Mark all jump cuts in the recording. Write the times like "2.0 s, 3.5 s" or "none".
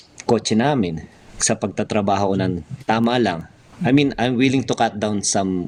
none